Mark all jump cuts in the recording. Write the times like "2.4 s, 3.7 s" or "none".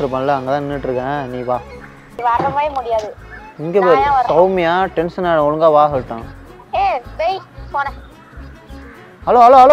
2.1 s